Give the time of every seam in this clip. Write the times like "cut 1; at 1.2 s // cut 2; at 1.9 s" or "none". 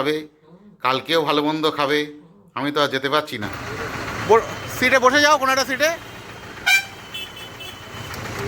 cut 1; at 3.5 s